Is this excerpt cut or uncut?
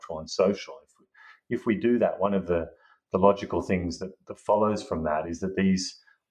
uncut